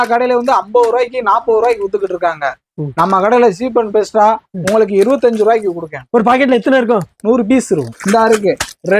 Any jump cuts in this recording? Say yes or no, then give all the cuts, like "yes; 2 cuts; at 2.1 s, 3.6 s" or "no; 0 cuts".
yes; 1 cut; at 7.9 s